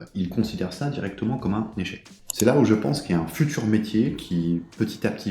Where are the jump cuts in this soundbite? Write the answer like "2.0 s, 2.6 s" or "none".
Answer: 2.0 s